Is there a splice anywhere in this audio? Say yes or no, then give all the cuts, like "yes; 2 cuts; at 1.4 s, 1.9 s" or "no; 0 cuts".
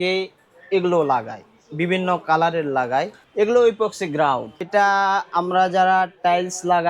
yes; 2 cuts; at 3.2 s, 4.6 s